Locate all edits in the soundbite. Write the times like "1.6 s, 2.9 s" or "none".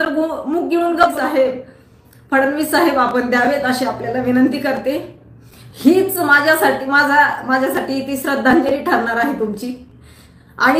1.2 s